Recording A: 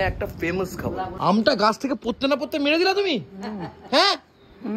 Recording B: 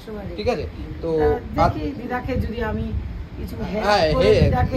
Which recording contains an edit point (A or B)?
A